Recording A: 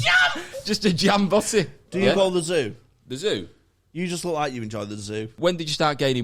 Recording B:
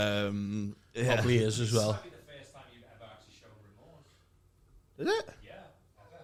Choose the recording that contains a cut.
A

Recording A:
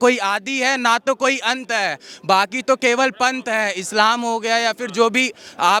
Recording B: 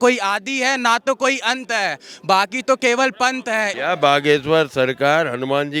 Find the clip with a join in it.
B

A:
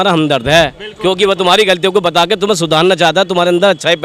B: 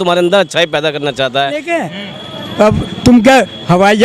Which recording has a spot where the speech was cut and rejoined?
B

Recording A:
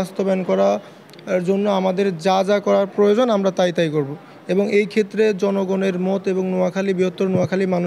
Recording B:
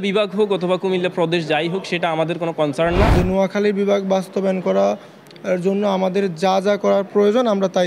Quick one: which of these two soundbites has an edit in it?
B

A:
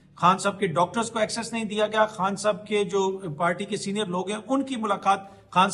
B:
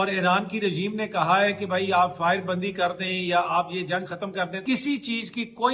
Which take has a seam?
B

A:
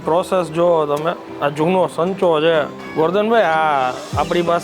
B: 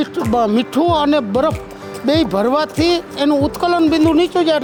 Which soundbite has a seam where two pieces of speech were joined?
A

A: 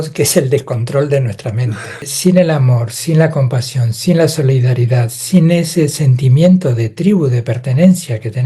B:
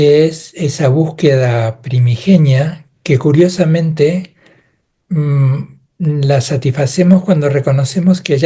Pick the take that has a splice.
A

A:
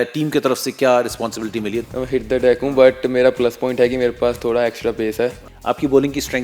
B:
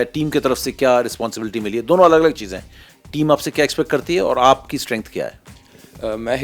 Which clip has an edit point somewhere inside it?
A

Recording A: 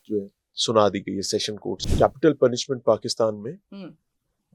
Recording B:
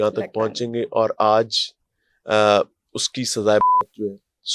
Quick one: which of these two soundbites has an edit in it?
A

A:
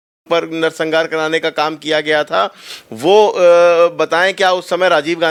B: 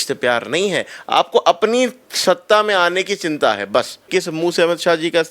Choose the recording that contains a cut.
B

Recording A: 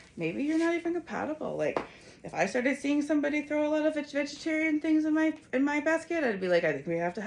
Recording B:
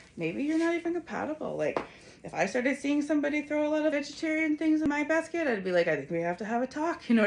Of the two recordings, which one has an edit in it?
B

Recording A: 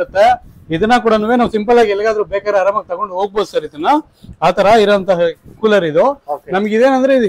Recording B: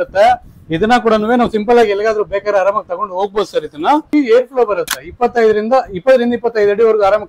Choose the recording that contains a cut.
B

